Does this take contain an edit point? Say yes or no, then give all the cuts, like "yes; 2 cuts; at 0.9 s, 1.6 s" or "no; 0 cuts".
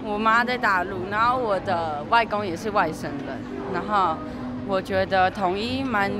no; 0 cuts